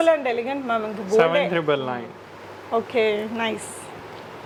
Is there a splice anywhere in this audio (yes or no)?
no